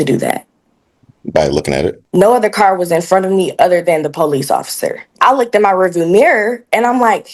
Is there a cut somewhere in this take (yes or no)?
yes